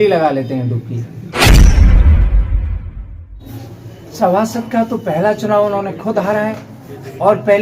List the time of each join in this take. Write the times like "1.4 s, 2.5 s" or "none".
1.2 s, 3.4 s